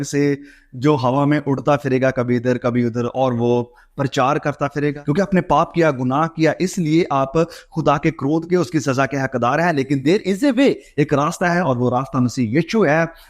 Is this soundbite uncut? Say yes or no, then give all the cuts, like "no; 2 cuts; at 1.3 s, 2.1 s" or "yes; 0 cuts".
no; 1 cut; at 5.0 s